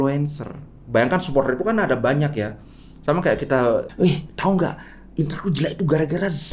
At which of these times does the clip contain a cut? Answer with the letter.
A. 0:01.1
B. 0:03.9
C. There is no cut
B